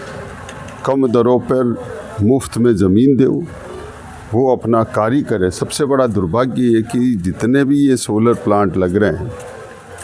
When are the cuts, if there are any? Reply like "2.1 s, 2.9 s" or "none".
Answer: none